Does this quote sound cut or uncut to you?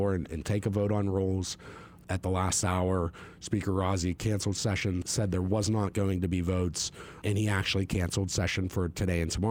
cut